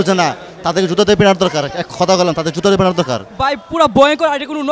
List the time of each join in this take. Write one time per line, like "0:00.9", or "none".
0:03.3